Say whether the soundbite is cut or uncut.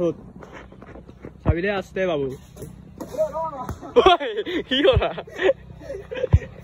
uncut